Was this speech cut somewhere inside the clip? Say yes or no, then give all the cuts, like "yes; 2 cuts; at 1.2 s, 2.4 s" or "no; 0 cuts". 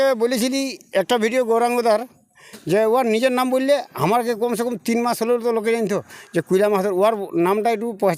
no; 0 cuts